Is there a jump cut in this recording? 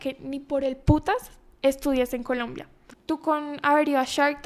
no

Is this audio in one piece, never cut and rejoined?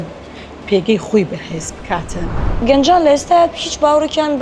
no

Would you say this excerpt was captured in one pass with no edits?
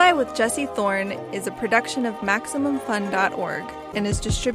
yes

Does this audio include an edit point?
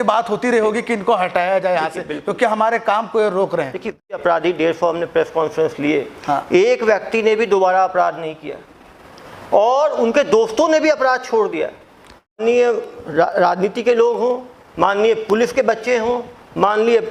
yes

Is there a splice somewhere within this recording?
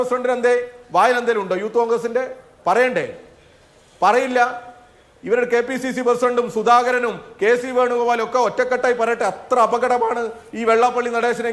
no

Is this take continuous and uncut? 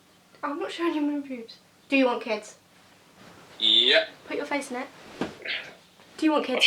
yes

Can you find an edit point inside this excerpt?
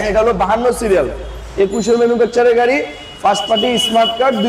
no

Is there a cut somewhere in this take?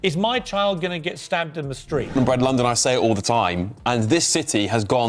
yes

